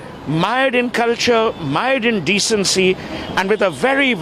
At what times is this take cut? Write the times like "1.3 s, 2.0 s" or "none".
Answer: none